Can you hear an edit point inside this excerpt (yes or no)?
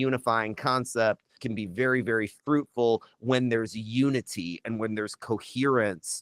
yes